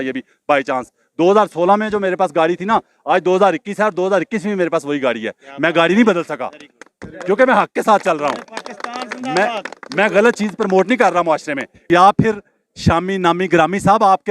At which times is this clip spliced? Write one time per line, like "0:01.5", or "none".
0:11.9